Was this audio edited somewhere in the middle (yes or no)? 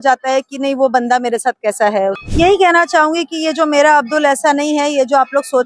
yes